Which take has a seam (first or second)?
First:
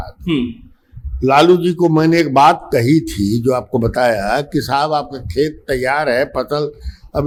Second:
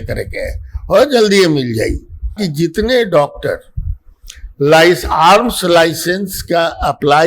second